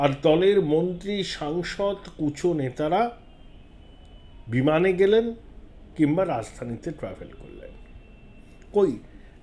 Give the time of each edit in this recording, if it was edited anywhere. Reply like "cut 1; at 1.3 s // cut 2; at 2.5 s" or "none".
none